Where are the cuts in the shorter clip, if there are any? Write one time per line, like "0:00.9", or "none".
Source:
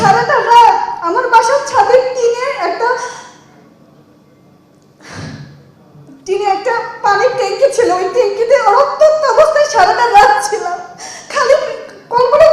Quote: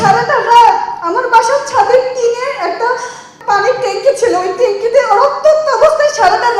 0:03.3